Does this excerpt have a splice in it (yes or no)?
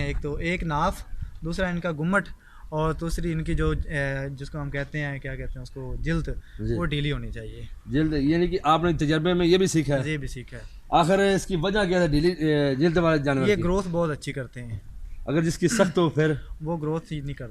no